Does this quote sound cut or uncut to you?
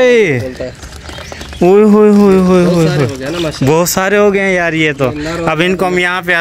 uncut